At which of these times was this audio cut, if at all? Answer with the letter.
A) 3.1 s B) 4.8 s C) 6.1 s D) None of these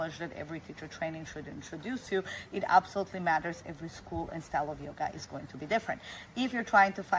D